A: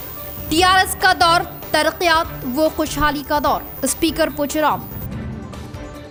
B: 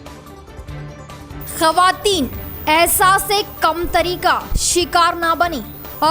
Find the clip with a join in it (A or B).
B